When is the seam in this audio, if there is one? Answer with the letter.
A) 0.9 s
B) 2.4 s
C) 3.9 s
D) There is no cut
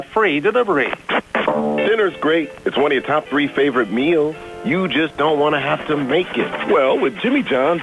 A